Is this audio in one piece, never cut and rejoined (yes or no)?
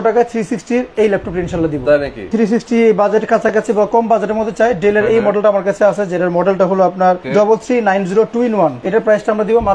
no